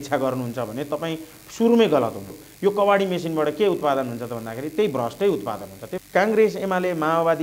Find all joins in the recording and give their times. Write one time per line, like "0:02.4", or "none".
0:02.4
0:05.8